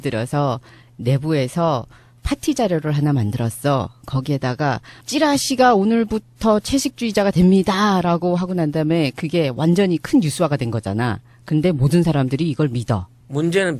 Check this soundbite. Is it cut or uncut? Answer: uncut